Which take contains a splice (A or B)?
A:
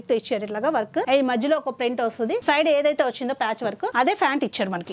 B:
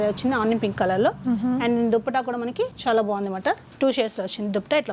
A